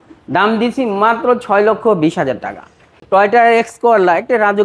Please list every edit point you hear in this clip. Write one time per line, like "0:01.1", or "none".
0:03.0